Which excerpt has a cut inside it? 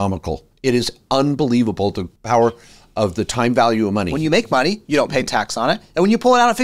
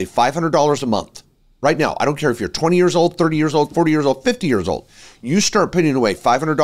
first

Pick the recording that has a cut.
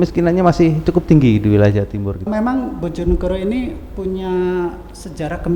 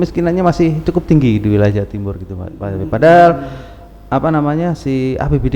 first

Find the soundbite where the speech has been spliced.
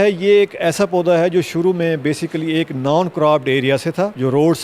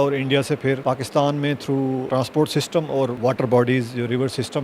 second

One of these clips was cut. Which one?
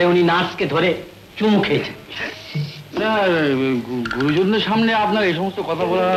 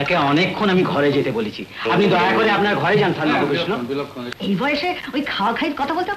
second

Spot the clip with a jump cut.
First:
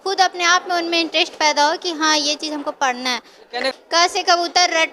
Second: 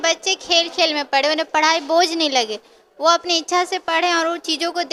first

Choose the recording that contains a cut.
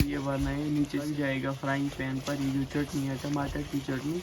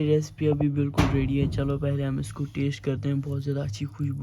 first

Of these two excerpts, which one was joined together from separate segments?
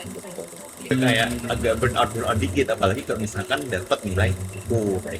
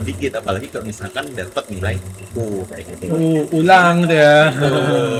first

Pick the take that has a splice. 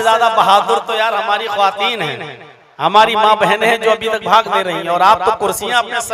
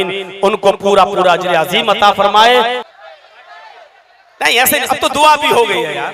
second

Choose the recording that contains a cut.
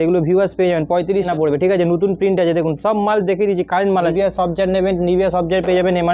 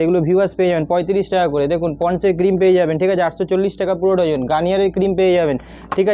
first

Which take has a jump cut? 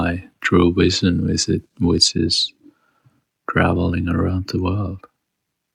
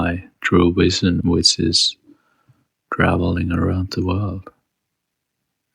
second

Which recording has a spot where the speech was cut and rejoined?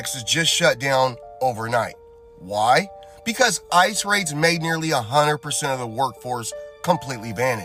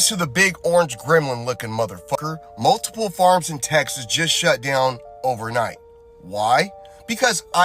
second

